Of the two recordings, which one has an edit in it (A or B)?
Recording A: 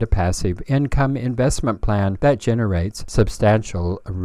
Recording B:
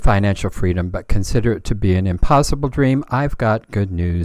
A